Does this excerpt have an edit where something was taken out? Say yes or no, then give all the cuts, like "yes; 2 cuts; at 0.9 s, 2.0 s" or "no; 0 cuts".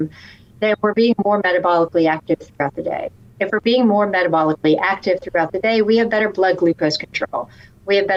no; 0 cuts